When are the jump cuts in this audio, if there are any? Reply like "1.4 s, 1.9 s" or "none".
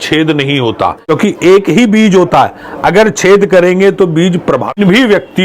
1.1 s, 4.7 s